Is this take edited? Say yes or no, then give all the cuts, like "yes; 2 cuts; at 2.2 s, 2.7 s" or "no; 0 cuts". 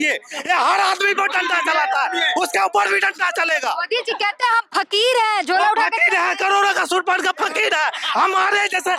no; 0 cuts